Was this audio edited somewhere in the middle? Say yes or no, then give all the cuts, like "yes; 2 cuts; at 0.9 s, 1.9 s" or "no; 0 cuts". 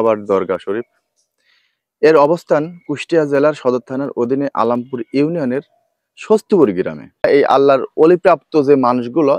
yes; 1 cut; at 7.3 s